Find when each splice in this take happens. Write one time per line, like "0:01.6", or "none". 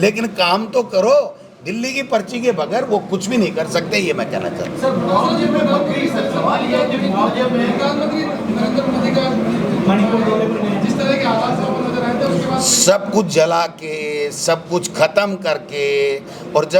none